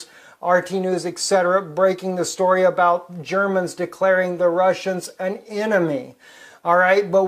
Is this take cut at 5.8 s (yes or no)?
yes